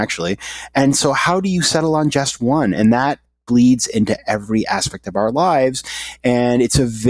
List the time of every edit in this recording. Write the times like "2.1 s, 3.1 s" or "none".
none